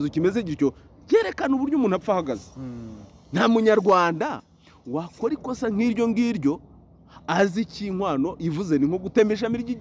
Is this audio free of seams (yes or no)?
yes